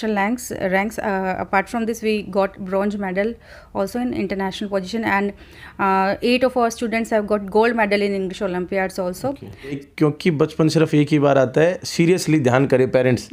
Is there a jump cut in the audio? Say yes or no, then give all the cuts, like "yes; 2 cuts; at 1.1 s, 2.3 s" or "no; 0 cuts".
yes; 1 cut; at 9.8 s